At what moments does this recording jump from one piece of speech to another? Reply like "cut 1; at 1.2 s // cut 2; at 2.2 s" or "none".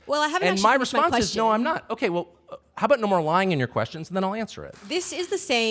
cut 1; at 4.8 s